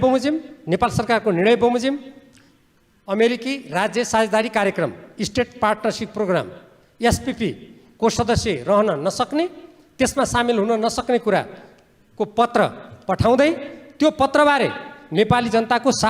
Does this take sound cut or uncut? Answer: uncut